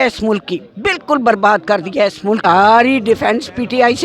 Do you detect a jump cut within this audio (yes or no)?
yes